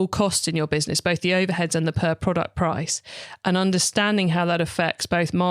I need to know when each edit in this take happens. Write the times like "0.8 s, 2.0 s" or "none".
none